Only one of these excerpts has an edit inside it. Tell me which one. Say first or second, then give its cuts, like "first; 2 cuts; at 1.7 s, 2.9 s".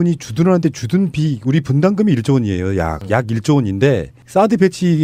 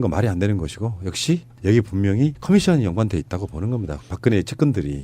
second; 1 cut; at 2.6 s